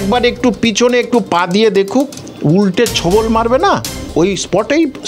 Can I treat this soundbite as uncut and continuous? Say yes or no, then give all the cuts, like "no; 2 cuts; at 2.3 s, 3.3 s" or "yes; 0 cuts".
no; 2 cuts; at 2.2 s, 4.0 s